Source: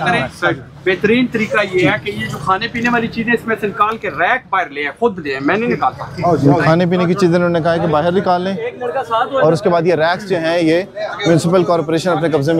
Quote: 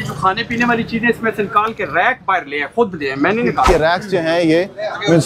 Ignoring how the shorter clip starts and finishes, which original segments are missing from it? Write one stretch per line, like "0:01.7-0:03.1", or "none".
0:05.9-0:09.9